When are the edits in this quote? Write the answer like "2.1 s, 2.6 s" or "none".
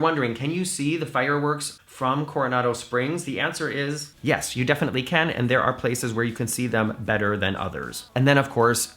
1.8 s